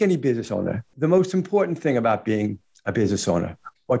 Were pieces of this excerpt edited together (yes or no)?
yes